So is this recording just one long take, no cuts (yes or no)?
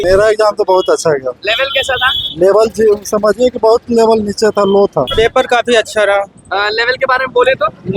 no